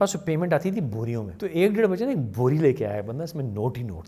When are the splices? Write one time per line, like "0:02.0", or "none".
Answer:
0:01.3